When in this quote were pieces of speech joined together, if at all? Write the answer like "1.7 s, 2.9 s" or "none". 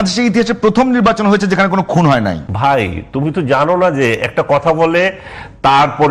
2.5 s

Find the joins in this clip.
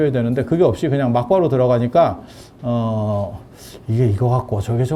none

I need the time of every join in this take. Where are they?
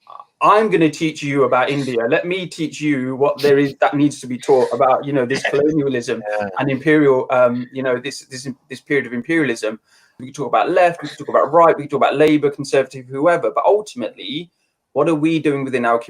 10.2 s

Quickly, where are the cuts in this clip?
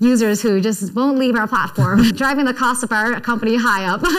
2.1 s

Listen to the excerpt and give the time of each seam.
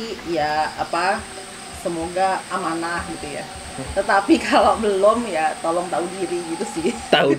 none

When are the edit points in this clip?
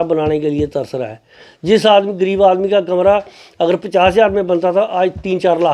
none

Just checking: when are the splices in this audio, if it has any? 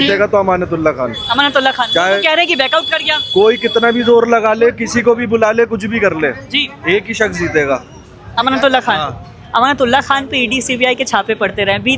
none

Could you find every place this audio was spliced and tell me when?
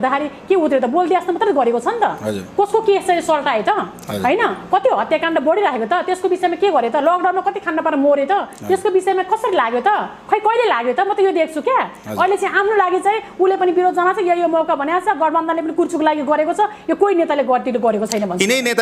none

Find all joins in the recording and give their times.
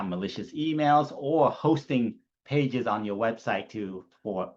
none

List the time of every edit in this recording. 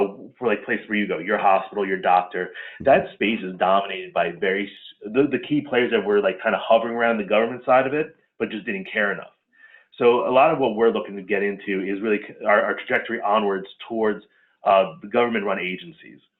none

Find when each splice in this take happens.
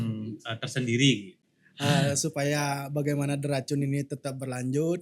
1.3 s

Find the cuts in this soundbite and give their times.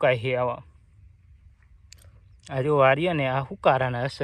none

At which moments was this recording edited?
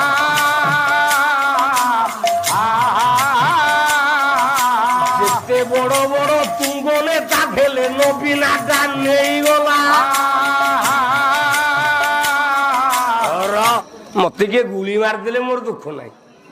14.0 s

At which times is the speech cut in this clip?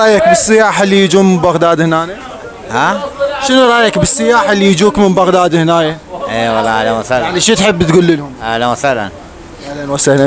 none

